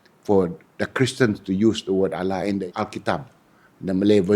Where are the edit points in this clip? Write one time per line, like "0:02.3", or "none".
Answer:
0:02.7